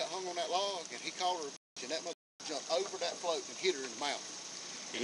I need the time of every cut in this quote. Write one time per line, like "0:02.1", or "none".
none